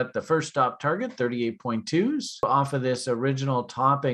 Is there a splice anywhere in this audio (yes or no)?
yes